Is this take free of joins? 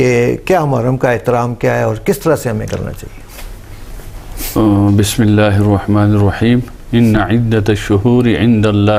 yes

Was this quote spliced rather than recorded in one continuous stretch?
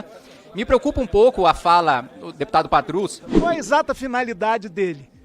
yes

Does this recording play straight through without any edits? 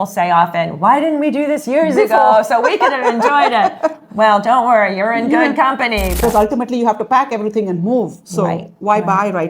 no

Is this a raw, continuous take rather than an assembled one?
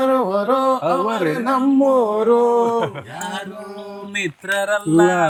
yes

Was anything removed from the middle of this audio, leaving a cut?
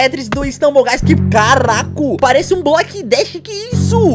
no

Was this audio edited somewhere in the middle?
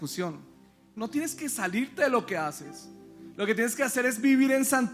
yes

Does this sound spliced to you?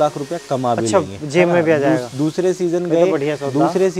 no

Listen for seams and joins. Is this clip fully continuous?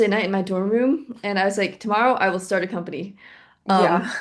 yes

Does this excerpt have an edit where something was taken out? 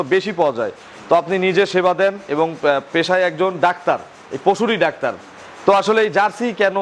no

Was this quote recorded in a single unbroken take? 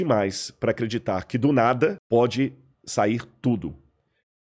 no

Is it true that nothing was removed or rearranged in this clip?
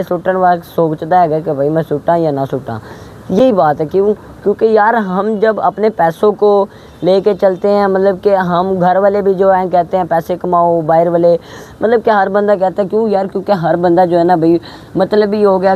yes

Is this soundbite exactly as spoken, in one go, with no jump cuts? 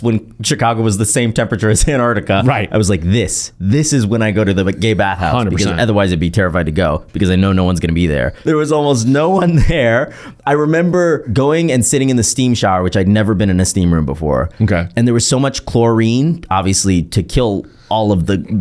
no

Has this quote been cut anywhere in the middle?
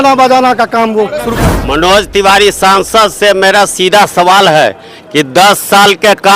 yes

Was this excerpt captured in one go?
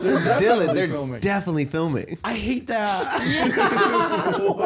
yes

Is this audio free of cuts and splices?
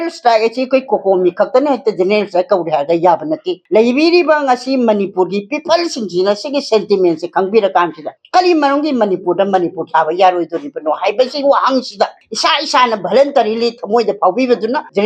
yes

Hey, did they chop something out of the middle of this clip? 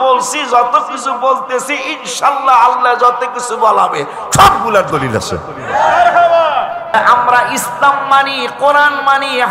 yes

